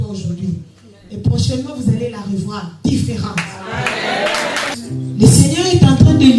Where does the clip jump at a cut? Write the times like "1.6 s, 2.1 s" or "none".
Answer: 4.7 s